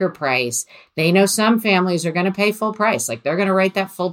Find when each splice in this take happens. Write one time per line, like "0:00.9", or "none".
none